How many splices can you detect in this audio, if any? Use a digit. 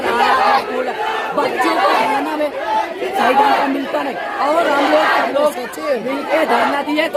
0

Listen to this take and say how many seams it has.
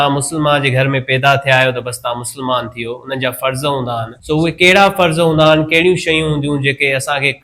1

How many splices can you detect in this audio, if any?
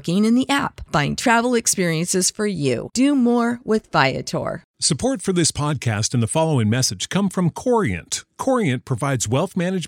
1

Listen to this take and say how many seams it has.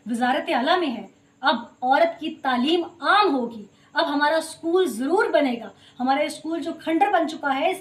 0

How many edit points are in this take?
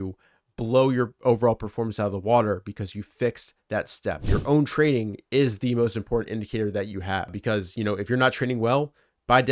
2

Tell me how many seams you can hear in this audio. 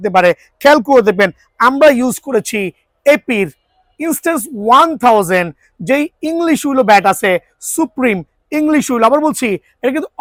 0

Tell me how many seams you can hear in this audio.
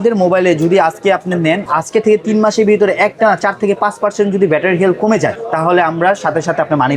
0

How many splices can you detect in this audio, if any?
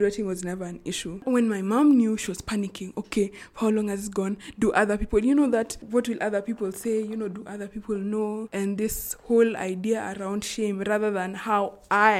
2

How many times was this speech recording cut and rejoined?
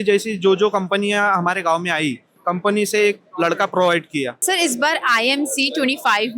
2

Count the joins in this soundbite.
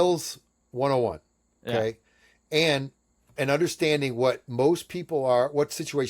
1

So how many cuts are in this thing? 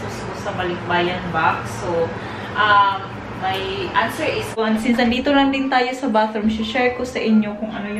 1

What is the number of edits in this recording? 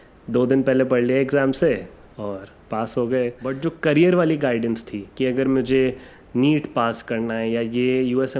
1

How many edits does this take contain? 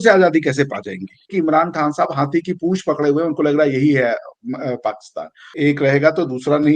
2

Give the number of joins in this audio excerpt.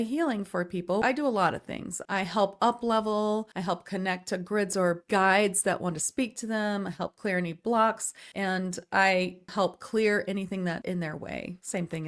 2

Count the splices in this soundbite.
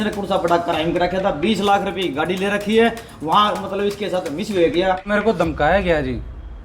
1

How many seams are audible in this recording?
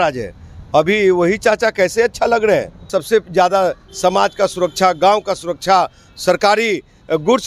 1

